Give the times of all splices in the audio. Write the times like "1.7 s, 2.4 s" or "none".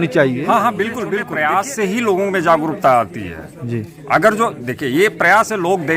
1.3 s